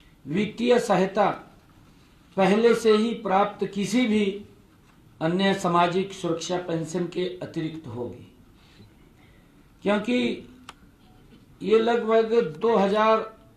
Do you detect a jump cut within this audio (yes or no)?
no